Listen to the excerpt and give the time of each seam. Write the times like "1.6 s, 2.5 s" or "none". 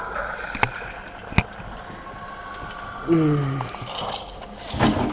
none

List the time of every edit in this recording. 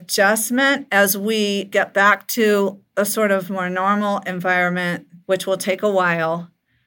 5.1 s

